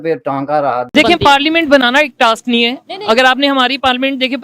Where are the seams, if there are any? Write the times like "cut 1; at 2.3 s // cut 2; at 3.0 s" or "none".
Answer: cut 1; at 0.9 s

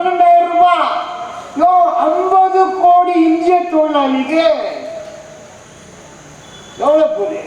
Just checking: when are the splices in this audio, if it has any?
none

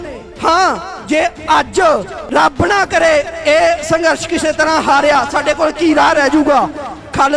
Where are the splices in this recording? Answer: cut 1; at 2.2 s

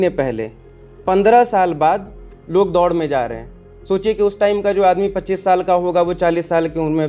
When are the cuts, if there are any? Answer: none

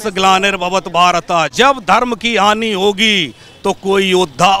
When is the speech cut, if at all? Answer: cut 1; at 1.5 s

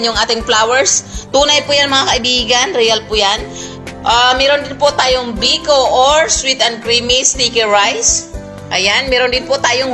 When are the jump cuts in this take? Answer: none

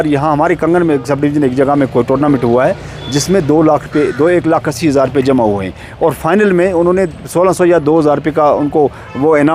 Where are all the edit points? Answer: none

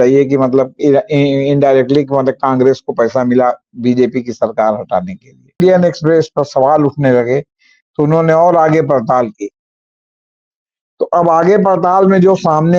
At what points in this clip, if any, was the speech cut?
cut 1; at 5.6 s

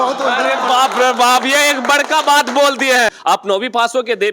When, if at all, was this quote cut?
cut 1; at 3.1 s

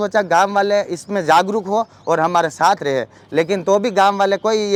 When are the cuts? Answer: none

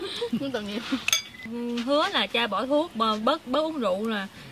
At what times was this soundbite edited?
cut 1; at 1.5 s

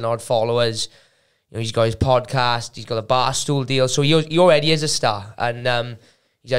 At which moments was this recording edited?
none

